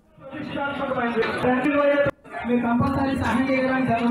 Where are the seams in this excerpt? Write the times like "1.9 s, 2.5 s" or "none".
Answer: 2.1 s